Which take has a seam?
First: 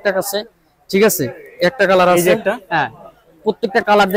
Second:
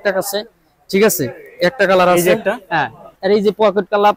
second; 1 cut; at 3.1 s

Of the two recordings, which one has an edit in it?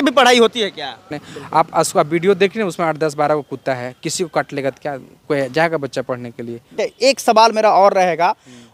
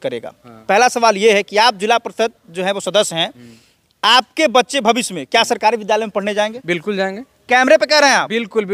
first; 2 cuts; at 1.0 s, 6.7 s

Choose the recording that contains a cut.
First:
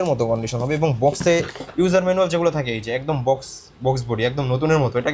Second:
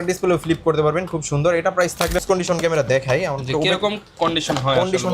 second; 1 cut; at 2.2 s

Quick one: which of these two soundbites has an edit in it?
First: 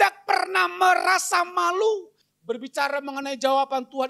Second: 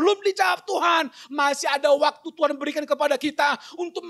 first; 1 cut; at 2.2 s

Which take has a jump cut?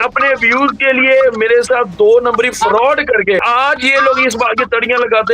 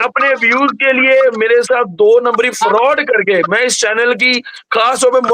first; 1 cut; at 3.4 s

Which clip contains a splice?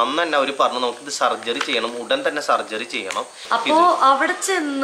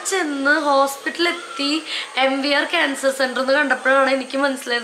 first; 1 cut; at 3.4 s

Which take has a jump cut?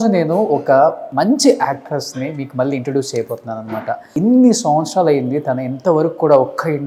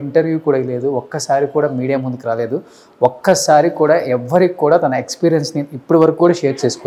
first; 2 cuts; at 1.0 s, 4.1 s

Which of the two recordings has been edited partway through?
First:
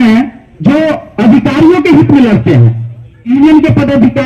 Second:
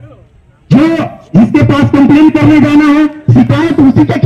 first; 1 cut; at 3.3 s

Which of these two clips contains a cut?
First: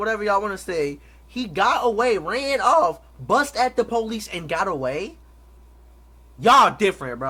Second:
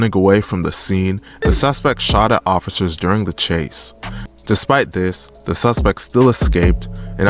second; 2 cuts; at 1.3 s, 4.1 s

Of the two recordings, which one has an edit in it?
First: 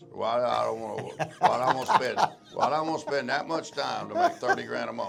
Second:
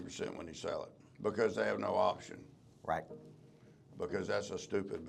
second; 1 cut; at 1.1 s

